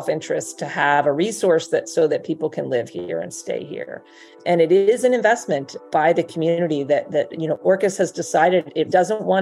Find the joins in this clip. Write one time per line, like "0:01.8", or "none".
0:04.3